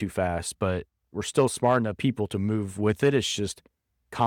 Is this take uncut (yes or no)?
yes